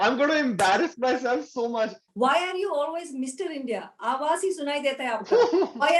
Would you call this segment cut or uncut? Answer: cut